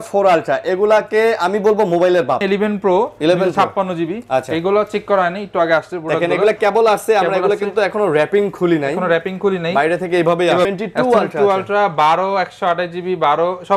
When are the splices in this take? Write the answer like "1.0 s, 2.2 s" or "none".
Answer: 2.4 s, 10.7 s